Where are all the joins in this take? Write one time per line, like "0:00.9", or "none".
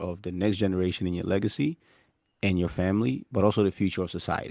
none